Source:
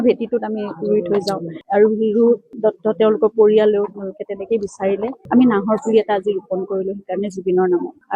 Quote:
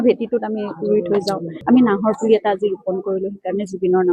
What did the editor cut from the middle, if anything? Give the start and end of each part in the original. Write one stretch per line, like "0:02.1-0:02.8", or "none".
0:01.5-0:05.2